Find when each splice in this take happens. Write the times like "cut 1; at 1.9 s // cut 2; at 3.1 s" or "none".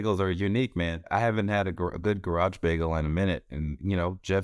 cut 1; at 1.1 s